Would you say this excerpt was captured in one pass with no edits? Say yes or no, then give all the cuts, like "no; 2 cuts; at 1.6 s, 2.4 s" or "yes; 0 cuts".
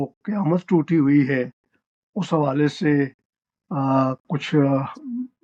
yes; 0 cuts